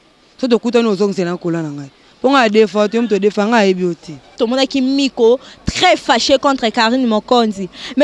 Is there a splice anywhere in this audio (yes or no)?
yes